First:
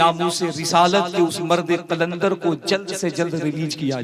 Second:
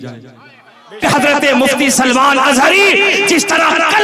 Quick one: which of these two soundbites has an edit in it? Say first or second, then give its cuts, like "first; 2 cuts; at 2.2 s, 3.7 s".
second; 1 cut; at 1.0 s